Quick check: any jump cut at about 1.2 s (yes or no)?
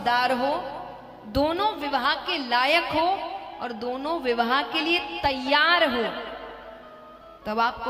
no